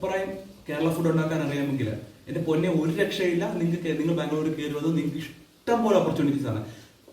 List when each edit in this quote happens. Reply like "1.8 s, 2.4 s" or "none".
none

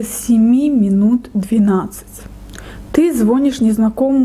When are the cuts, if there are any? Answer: none

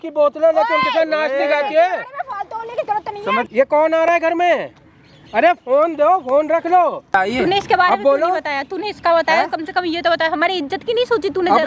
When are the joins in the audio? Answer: 3.5 s, 7.1 s

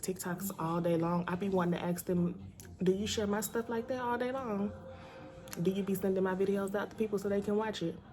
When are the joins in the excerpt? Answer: none

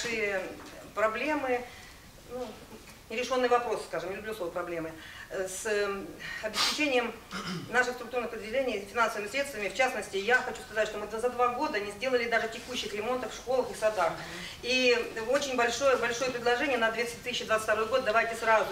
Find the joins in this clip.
none

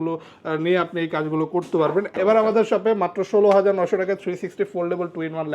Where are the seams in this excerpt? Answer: 2.1 s

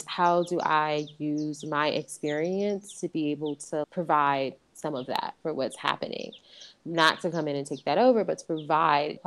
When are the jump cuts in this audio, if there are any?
none

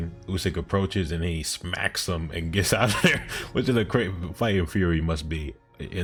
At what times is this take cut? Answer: none

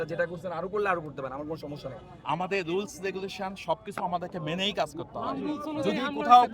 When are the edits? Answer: 2.1 s

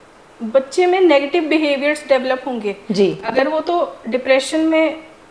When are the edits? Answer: none

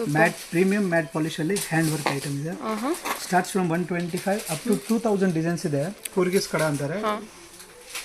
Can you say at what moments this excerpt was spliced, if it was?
6.0 s

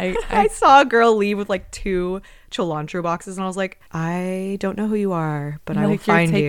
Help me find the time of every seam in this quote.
3.8 s

